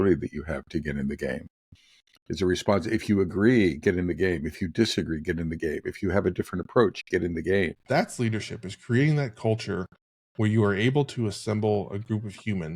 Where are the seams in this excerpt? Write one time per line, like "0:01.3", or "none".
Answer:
0:07.8